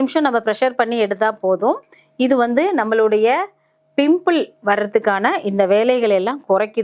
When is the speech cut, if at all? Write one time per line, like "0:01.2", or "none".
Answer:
none